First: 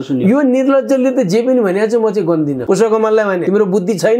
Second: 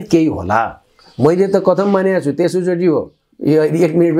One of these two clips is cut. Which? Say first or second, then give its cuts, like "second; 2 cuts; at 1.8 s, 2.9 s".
first; 2 cuts; at 2.6 s, 3.4 s